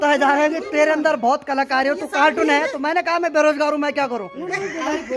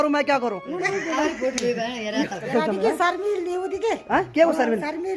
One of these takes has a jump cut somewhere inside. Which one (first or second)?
second